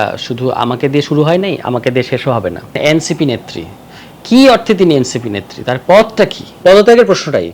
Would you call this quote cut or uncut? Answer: cut